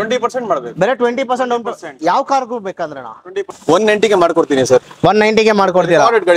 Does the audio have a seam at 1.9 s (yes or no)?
no